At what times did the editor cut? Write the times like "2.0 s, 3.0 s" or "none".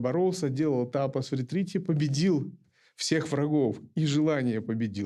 none